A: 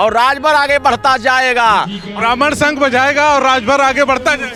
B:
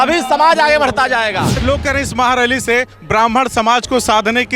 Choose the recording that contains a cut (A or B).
B